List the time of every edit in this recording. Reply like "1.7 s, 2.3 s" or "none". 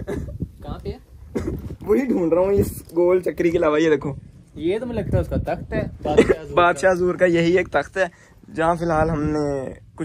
none